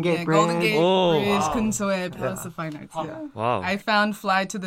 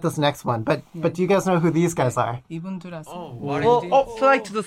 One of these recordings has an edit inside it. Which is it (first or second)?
first